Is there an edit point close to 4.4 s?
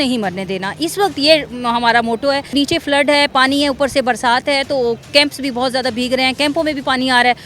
no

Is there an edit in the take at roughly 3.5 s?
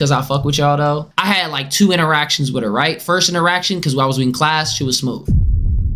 no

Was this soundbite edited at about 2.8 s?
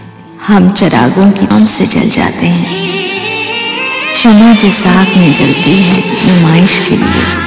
no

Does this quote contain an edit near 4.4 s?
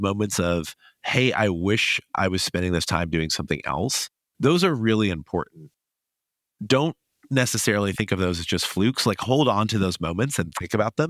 no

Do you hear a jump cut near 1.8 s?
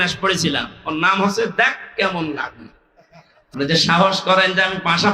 no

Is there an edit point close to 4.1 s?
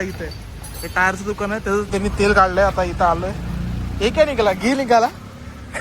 no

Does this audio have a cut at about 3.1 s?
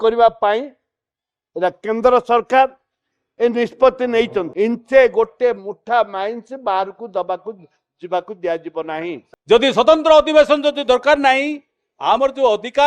no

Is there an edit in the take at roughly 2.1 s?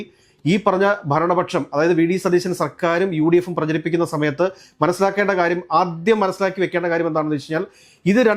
no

